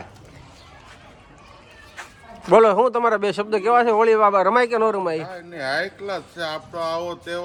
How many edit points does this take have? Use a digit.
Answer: 0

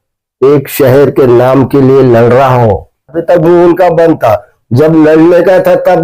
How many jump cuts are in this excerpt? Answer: 1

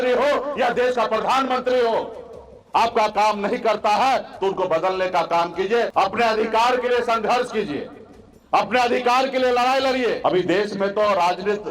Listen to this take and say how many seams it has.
2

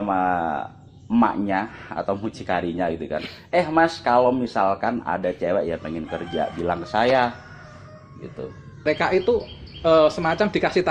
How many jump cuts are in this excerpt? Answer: 1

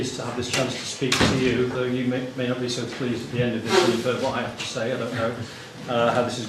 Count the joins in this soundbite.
1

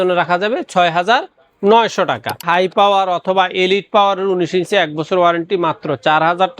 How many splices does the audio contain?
1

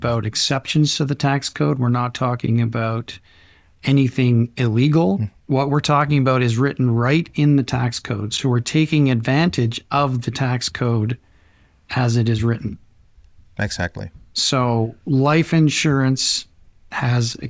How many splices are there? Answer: 2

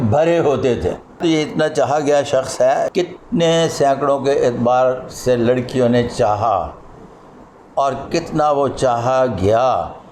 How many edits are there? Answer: 2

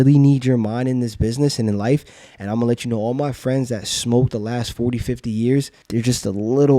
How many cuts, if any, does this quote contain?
1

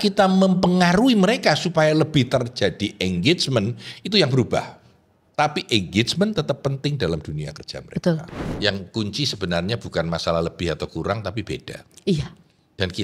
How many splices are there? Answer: 1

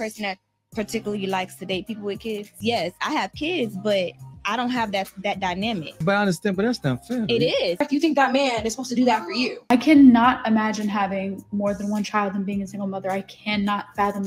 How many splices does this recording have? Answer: 4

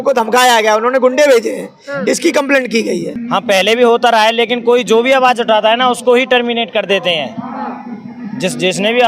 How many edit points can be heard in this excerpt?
1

